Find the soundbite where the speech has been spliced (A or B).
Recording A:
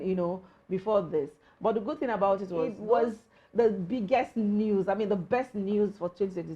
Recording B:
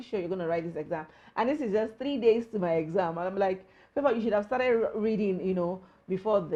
A